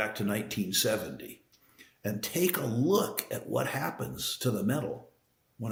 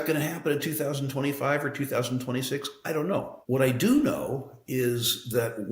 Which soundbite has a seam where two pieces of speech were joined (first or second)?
second